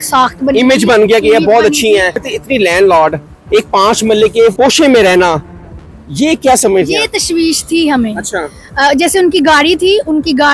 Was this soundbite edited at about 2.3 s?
yes; 2 cuts; at 2.3 s, 4.5 s

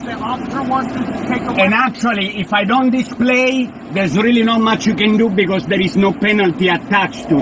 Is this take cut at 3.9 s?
no; 0 cuts

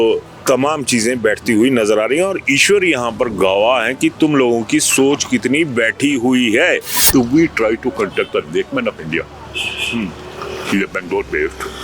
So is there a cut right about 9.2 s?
no; 1 cut; at 6.9 s

